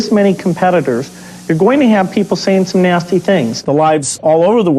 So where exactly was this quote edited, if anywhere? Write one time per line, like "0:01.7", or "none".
0:03.6